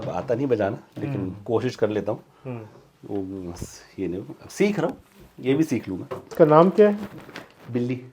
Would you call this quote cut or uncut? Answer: cut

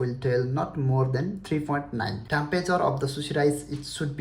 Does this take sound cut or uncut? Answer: cut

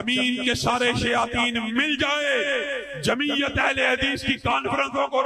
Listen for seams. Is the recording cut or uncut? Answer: uncut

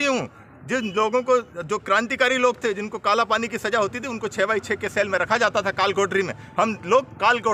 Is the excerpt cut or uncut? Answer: uncut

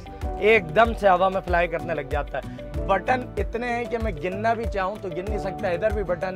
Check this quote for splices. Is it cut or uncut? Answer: uncut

